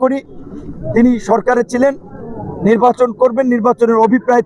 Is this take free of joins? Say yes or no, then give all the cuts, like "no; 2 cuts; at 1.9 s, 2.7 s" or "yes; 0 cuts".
yes; 0 cuts